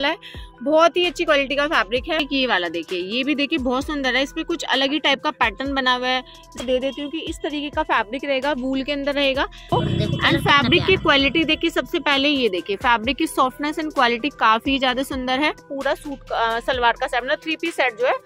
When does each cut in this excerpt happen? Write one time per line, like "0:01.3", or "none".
0:02.2
0:06.6
0:09.7
0:15.7

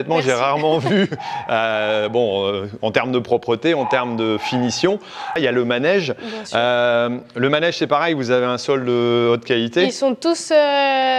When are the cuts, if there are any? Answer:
0:05.4

